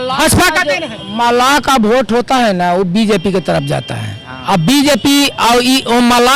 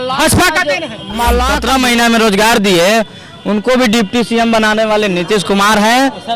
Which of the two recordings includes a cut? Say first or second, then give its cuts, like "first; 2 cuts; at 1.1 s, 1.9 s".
second; 1 cut; at 1.6 s